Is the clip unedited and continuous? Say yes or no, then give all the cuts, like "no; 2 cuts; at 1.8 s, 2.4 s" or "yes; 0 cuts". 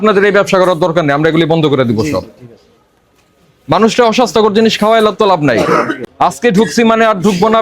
no; 1 cut; at 6.0 s